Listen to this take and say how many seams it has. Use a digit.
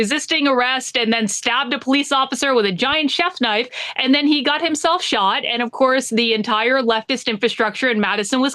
0